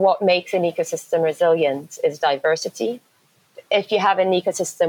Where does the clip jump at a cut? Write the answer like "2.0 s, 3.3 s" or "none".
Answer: 3.5 s